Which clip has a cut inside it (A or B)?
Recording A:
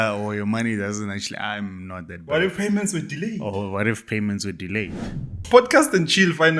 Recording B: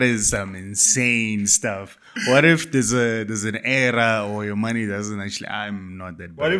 A